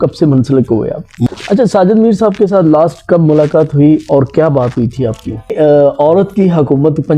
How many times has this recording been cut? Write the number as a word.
two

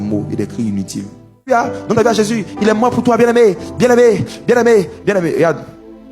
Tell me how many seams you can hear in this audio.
one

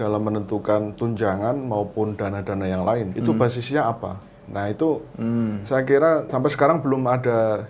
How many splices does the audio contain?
two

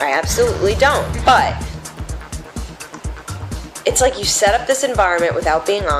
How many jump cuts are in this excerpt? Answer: one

